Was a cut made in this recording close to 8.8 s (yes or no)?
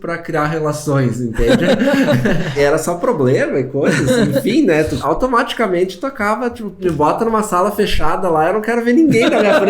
no